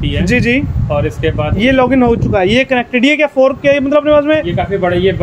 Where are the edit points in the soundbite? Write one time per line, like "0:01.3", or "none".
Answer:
0:01.5